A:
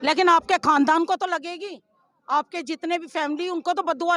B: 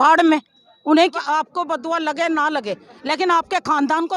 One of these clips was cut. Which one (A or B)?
B